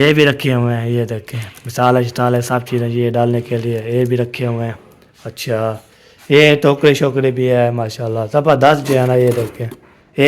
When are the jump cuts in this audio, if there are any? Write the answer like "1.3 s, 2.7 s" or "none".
none

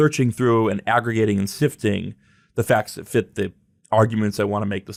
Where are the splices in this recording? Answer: none

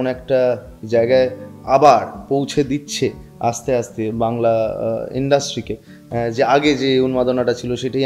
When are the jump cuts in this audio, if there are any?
none

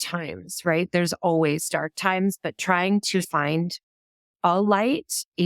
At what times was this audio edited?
1.9 s, 3.3 s

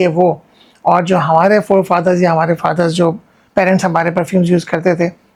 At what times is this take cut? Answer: none

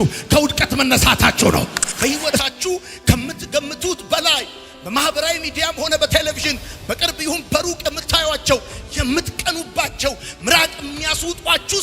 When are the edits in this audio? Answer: 1.8 s

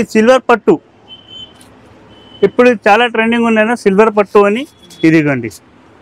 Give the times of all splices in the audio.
none

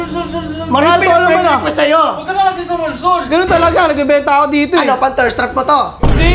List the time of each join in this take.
none

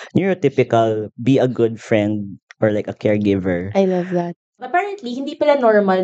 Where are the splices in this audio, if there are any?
4.6 s

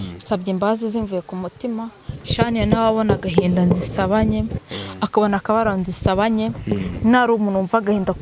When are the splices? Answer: none

